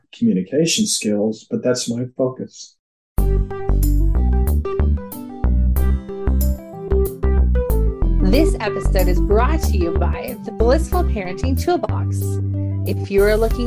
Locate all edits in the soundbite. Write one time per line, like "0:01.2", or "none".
0:03.0